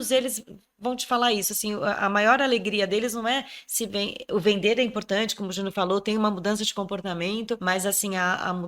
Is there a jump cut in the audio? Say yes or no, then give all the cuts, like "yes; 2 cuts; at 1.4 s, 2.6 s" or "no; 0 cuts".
yes; 1 cut; at 7.6 s